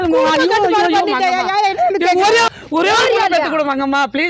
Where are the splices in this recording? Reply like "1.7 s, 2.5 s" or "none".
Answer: 2.5 s